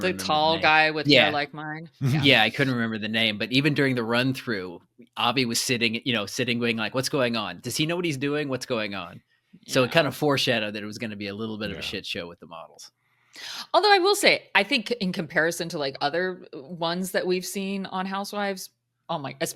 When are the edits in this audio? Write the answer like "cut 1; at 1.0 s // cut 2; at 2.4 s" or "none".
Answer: none